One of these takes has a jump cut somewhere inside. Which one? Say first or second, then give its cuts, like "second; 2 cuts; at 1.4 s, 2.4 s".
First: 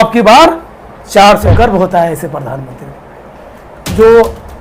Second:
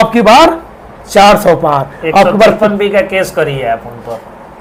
first; 1 cut; at 1.5 s